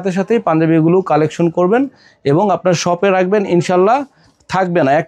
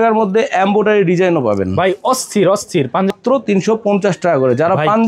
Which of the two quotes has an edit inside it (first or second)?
second